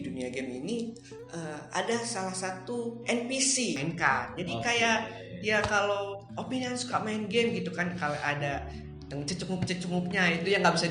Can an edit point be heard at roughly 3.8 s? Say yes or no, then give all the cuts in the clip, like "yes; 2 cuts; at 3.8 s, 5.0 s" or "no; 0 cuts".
yes; 1 cut; at 3.8 s